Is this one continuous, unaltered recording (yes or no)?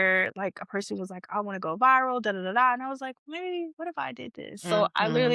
yes